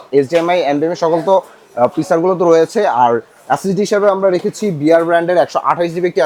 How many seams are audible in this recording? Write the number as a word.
zero